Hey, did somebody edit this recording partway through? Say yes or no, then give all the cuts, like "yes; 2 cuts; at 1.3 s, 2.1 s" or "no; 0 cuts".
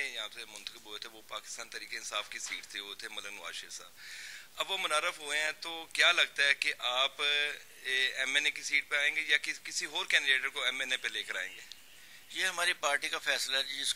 no; 0 cuts